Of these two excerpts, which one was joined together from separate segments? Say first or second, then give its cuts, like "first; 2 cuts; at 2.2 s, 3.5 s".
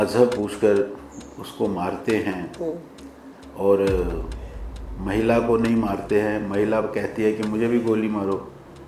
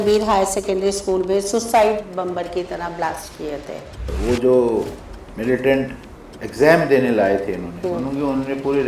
second; 1 cut; at 4.1 s